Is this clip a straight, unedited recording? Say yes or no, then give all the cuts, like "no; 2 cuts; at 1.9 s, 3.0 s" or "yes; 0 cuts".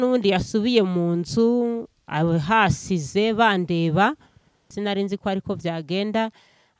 no; 1 cut; at 4.7 s